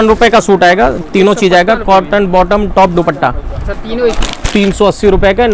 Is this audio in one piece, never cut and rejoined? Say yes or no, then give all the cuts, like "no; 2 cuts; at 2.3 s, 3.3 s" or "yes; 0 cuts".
no; 1 cut; at 4.3 s